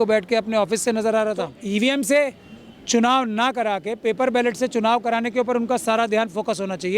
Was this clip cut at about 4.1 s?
no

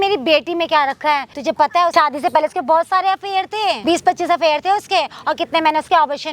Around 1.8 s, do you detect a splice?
yes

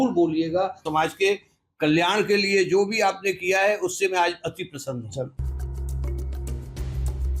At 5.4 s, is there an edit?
yes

